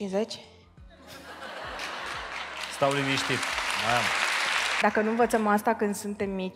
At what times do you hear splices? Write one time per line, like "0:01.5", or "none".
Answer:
0:04.8